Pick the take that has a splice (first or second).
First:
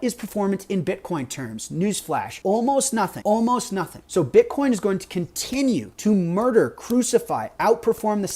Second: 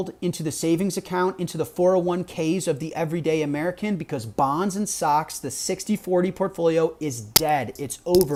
first